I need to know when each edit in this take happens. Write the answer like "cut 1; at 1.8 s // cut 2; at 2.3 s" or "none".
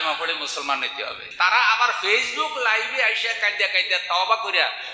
cut 1; at 1.2 s

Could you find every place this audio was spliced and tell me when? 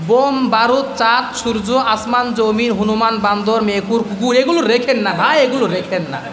none

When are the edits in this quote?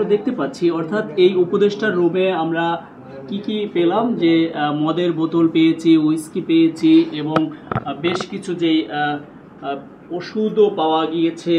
none

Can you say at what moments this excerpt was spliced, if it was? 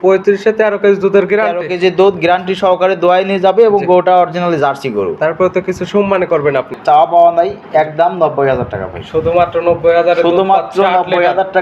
cut 1; at 6.7 s

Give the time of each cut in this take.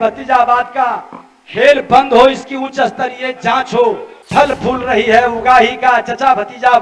cut 1; at 4.1 s

